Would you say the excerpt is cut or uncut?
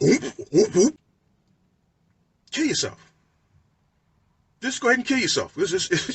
cut